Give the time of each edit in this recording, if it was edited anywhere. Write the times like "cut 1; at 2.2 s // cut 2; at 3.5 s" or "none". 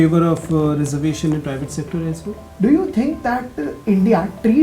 cut 1; at 2.4 s